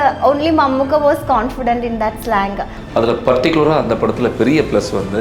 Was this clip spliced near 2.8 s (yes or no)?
yes